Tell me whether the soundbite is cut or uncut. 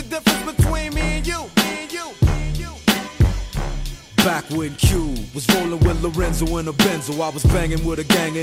uncut